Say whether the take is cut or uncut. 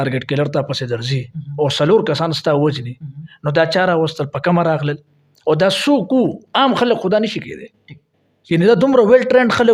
uncut